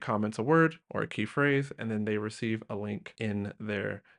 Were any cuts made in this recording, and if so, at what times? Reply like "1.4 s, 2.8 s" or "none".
0.8 s, 3.1 s